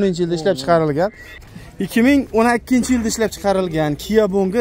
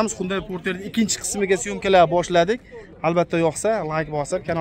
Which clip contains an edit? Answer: first; 1 cut; at 1.3 s

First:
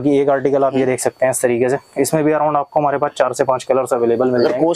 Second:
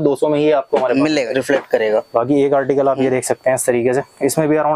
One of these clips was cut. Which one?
second; 1 cut; at 1.3 s

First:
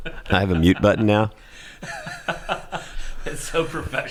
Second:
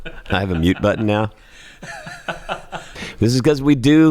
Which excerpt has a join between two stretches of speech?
second; 1 cut; at 3.0 s

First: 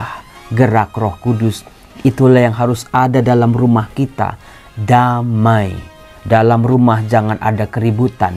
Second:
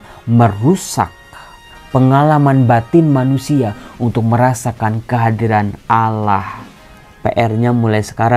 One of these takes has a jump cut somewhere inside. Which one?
second; 1 cut; at 7.0 s

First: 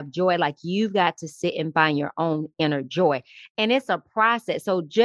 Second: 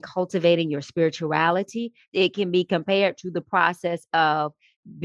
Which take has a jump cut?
second; 1 cut; at 2.1 s

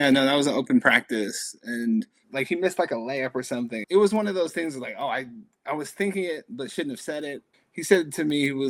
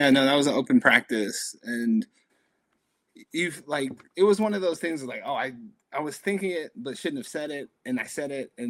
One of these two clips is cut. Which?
first; 3 cuts; at 2.2 s, 3.8 s, 7.5 s

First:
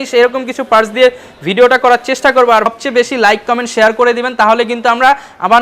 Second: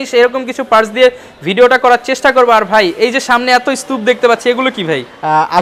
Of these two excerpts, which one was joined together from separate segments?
first; 1 cut; at 2.7 s

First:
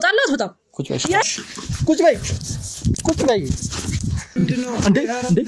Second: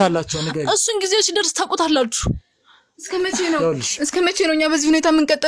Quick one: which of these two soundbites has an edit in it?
first; 2 cuts; at 1.2 s, 4.4 s

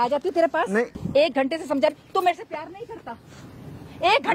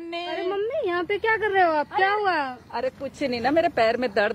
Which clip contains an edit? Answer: first; 1 cut; at 1.0 s

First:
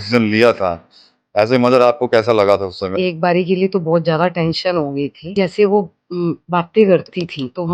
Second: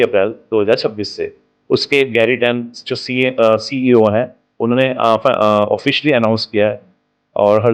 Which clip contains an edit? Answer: first; 2 cuts; at 2.9 s, 5.3 s

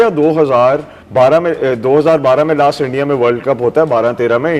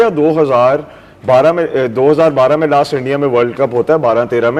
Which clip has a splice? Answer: first; 1 cut; at 1.0 s

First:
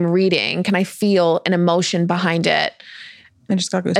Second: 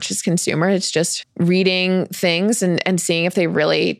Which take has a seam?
second; 1 cut; at 1.2 s

